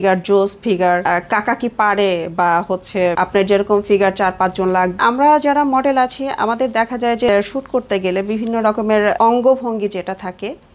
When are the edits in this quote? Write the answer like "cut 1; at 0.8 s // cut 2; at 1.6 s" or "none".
cut 1; at 1.0 s // cut 2; at 3.1 s // cut 3; at 5.0 s // cut 4; at 7.3 s // cut 5; at 9.2 s